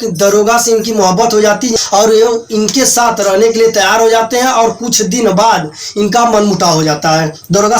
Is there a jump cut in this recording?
yes; 1 cut; at 1.7 s

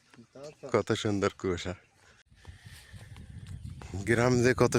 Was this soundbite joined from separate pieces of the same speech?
yes; 1 cut; at 2.2 s

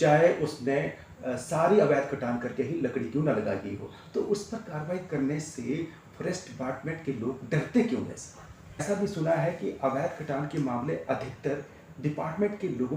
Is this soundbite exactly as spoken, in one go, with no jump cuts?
no; 1 cut; at 8.8 s

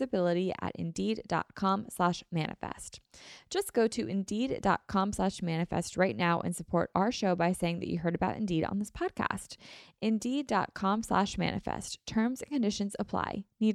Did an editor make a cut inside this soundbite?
no; 0 cuts

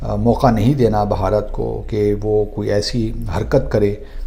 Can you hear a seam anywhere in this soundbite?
no; 0 cuts

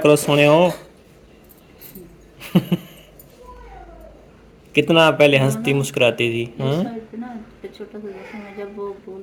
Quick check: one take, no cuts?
yes; 0 cuts

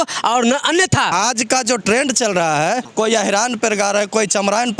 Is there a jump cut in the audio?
yes; 2 cuts; at 1.1 s, 2.9 s

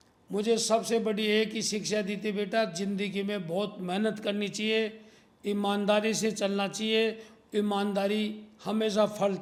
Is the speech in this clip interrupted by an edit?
no; 0 cuts

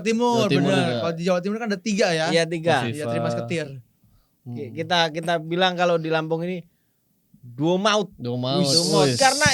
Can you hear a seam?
no; 0 cuts

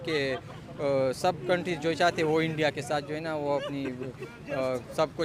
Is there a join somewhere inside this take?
no; 0 cuts

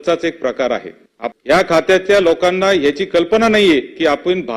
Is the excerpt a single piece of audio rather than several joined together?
no; 1 cut; at 1.1 s

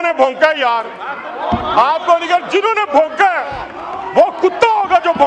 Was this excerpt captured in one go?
yes; 0 cuts

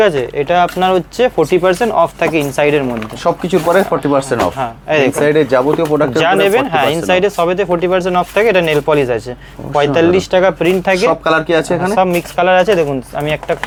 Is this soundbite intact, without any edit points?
yes; 0 cuts

